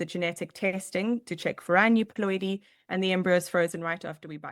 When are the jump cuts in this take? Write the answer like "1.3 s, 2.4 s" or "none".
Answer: none